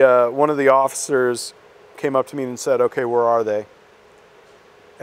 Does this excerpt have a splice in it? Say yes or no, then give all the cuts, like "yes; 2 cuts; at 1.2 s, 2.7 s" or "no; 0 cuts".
yes; 1 cut; at 1.9 s